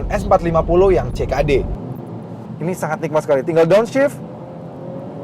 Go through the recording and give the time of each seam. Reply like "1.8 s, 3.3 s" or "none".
2.1 s

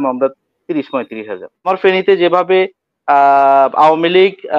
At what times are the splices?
1.6 s

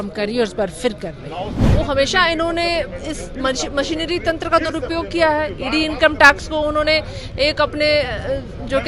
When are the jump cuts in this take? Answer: 1.6 s

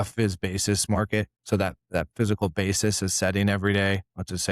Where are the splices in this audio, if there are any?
1.4 s

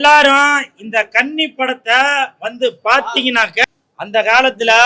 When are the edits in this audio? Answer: 3.7 s

